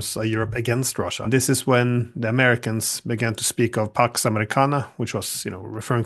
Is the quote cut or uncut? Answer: cut